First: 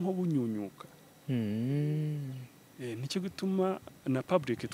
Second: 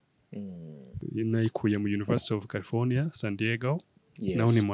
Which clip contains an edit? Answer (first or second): second